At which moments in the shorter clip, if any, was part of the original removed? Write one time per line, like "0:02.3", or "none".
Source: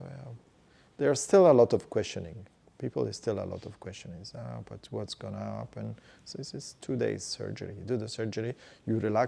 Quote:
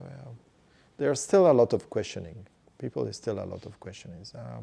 none